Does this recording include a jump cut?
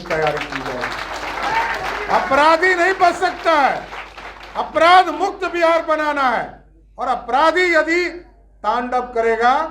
no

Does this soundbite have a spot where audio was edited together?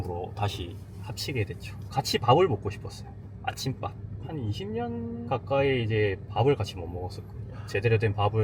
no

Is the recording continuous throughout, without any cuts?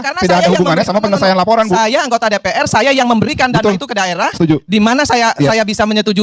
yes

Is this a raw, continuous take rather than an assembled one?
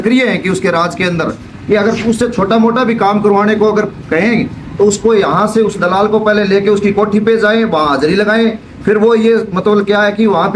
yes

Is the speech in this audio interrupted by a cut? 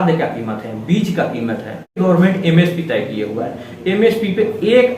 yes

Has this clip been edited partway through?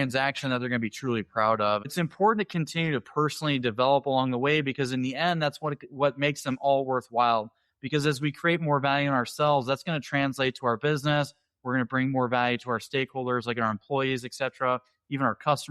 yes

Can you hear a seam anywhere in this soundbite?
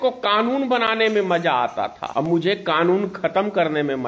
yes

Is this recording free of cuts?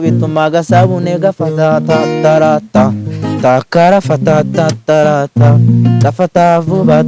yes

